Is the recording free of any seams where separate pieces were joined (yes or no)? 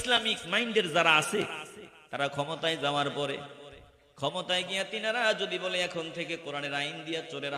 yes